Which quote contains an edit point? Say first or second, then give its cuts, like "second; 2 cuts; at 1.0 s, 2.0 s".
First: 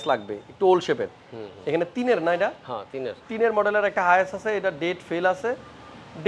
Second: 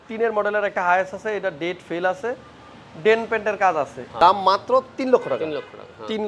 second; 1 cut; at 4.0 s